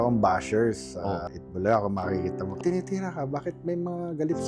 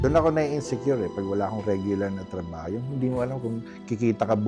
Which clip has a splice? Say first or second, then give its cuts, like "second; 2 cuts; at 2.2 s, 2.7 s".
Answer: first; 1 cut; at 2.6 s